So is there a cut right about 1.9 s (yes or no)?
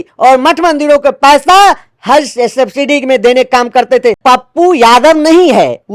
no